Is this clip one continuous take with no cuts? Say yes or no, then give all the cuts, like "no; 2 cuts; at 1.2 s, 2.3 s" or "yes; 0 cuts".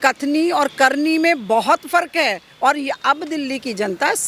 yes; 0 cuts